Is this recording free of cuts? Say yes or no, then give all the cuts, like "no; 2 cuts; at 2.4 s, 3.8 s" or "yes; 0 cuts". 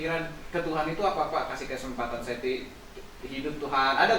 yes; 0 cuts